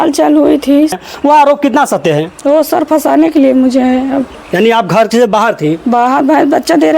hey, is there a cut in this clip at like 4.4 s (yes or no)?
yes